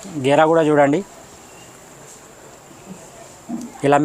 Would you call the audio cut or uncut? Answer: uncut